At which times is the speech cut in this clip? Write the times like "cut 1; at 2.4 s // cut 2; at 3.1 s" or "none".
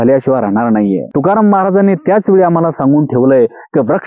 cut 1; at 1.1 s